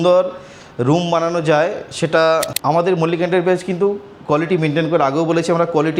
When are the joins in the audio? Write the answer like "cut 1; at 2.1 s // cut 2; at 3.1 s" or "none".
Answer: cut 1; at 2.5 s